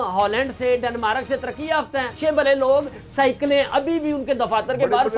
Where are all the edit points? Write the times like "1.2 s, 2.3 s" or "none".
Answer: 2.1 s